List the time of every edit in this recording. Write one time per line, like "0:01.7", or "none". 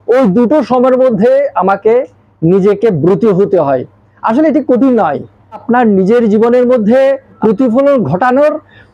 0:05.6
0:07.4